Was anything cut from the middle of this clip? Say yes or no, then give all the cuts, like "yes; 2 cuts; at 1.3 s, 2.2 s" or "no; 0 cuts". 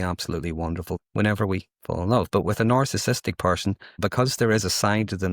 yes; 2 cuts; at 0.9 s, 4.0 s